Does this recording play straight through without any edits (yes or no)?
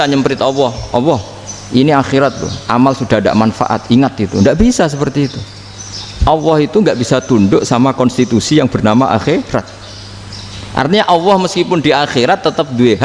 yes